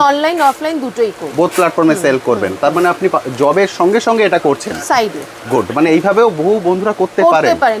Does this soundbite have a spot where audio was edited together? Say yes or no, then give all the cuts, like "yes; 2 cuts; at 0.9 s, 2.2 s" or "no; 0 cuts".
no; 0 cuts